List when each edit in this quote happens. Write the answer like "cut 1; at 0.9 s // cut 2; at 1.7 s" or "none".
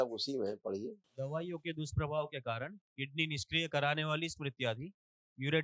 cut 1; at 1.0 s